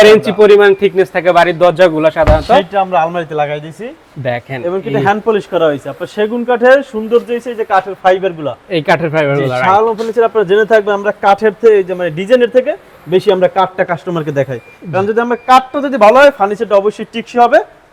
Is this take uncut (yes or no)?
yes